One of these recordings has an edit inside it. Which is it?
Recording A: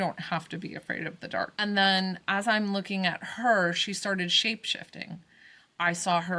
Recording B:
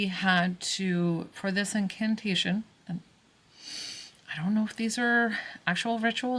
A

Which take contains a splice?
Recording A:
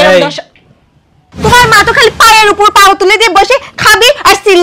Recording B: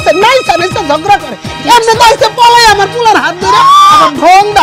A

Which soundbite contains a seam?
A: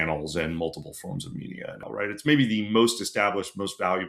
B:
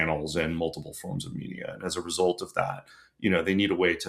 A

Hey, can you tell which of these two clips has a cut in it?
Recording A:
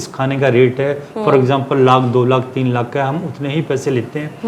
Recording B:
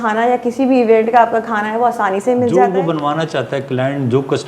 B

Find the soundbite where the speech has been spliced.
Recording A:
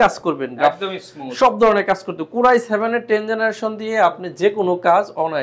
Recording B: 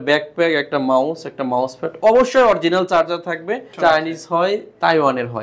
B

